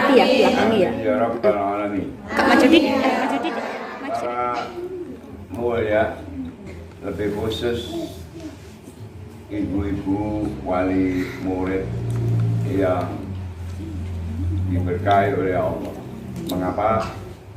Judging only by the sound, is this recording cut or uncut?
cut